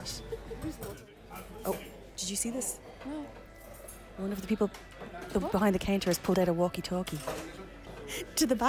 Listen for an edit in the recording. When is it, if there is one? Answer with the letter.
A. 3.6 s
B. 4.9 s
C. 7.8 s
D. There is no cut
C